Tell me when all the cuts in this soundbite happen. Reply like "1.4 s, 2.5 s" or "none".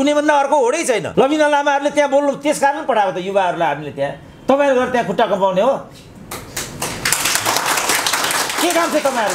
1.1 s